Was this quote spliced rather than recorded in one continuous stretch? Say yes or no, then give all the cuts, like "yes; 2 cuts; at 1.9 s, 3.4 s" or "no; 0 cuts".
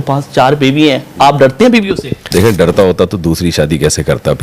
yes; 1 cut; at 1.8 s